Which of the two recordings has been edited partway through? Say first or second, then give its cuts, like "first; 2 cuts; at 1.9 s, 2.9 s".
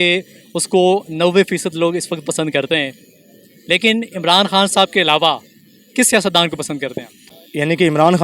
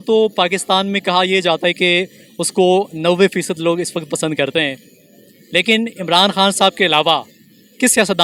first; 1 cut; at 7.3 s